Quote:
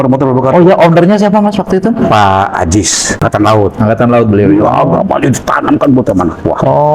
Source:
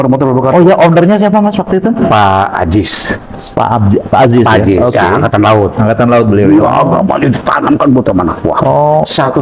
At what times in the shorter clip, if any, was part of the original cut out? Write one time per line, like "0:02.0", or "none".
0:03.2

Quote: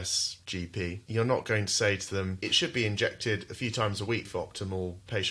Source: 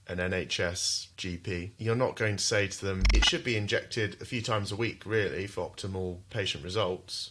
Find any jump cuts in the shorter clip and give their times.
0:04.3

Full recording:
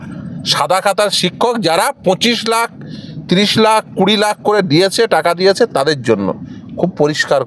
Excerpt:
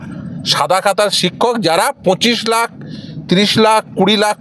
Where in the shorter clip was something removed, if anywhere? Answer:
none

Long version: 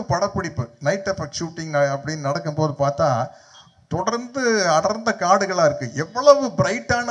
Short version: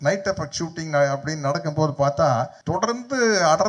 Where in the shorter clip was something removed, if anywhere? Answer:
0:02.6

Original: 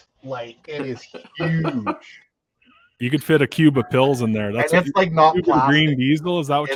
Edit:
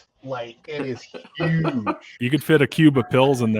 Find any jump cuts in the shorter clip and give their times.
0:02.1

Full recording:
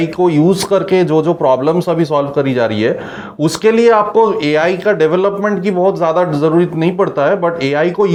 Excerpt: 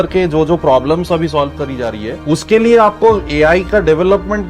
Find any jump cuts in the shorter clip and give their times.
0:02.1

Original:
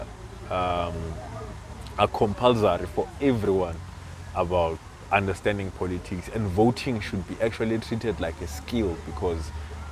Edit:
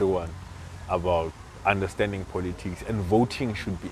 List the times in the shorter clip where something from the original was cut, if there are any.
none

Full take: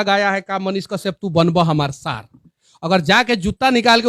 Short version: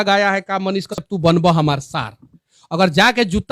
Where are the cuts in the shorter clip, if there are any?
0:01.0

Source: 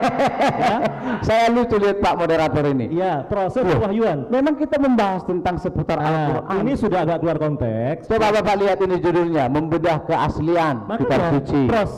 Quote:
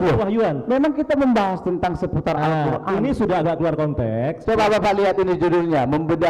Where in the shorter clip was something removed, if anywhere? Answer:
none

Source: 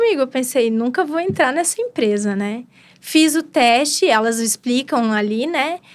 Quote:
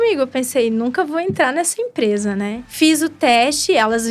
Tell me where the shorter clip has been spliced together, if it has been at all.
0:02.6

